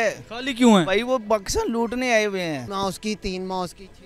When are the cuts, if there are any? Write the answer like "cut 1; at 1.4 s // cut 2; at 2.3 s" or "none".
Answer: cut 1; at 2.7 s